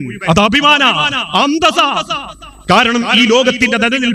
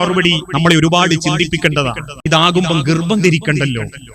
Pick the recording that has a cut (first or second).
second